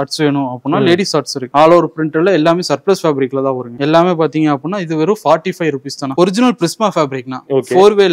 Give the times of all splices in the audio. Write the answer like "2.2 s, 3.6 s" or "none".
3.7 s, 6.1 s